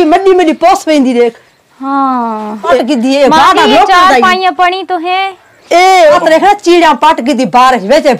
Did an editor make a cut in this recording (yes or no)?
yes